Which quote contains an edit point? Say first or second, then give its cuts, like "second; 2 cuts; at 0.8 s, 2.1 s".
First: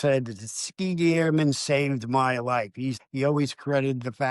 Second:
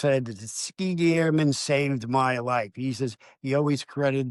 first; 1 cut; at 3.0 s